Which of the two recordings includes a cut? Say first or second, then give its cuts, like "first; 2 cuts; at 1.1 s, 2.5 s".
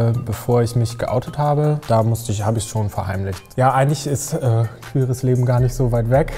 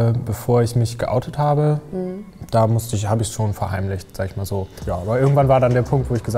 first; 2 cuts; at 1.8 s, 3.5 s